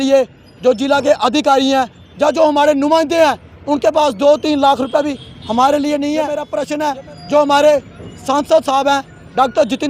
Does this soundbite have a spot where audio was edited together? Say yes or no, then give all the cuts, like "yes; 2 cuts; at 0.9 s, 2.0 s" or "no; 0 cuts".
yes; 1 cut; at 6.6 s